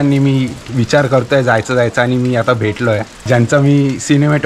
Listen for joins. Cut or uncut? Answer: cut